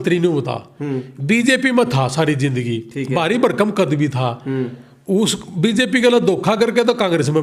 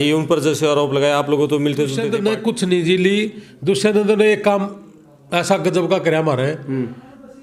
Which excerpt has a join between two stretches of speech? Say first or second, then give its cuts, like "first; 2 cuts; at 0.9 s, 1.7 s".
second; 1 cut; at 2.0 s